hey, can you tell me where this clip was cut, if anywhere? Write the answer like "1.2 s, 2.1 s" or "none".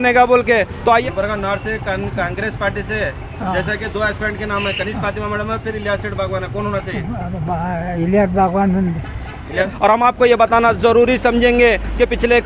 1.0 s, 9.7 s